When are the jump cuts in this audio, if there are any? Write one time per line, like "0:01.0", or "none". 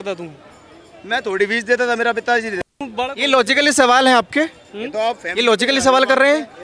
0:02.8